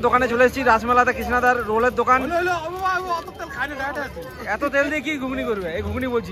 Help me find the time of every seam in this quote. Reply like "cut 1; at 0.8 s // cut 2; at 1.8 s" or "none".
none